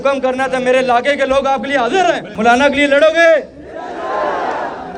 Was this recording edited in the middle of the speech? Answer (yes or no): yes